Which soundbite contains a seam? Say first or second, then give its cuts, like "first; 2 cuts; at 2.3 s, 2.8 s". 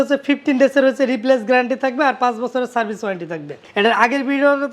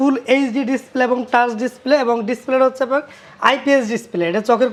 first; 1 cut; at 3.6 s